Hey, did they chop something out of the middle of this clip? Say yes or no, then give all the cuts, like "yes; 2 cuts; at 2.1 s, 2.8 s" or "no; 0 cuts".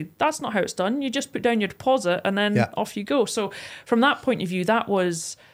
no; 0 cuts